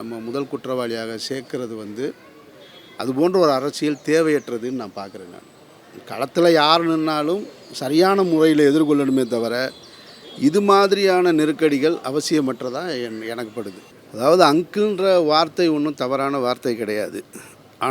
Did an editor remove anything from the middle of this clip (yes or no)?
yes